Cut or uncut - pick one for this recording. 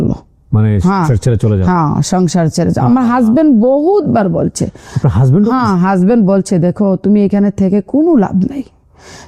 uncut